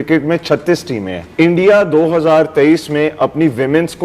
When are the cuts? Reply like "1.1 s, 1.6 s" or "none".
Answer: 1.2 s